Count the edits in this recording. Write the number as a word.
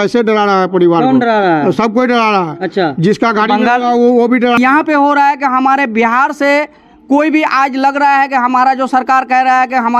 one